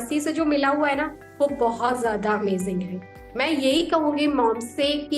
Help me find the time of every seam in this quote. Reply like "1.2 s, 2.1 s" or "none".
2.9 s

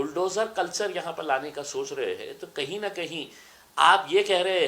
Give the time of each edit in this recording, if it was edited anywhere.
none

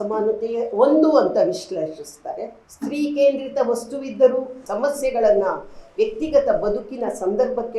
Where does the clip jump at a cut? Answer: 2.6 s, 4.6 s

